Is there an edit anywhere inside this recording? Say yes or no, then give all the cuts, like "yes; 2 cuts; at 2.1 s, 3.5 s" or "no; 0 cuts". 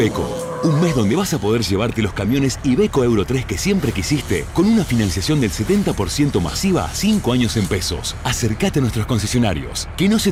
no; 0 cuts